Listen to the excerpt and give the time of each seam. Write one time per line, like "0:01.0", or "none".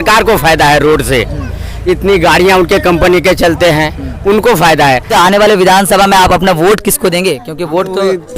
0:05.1